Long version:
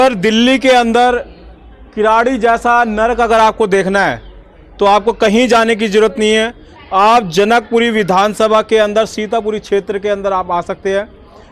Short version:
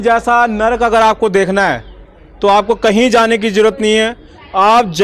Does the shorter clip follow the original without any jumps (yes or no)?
yes